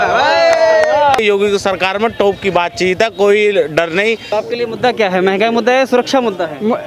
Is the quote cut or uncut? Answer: cut